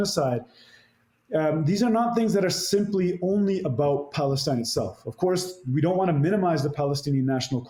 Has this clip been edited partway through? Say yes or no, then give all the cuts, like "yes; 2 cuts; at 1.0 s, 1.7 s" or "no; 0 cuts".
no; 0 cuts